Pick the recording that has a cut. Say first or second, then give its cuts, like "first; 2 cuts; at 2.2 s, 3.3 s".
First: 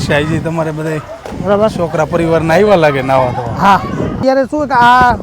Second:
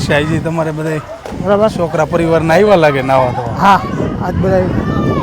first; 1 cut; at 4.2 s